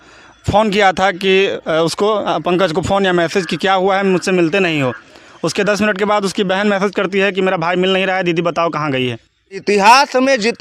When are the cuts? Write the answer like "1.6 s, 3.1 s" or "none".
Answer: 9.6 s